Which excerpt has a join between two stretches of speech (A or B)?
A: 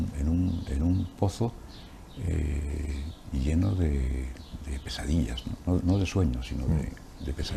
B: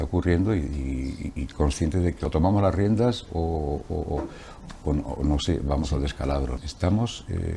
B